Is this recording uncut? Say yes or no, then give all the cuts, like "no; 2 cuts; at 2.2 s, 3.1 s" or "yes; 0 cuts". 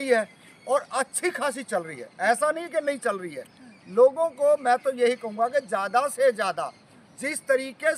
yes; 0 cuts